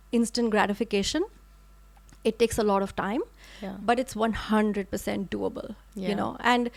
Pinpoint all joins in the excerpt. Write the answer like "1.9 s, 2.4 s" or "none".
none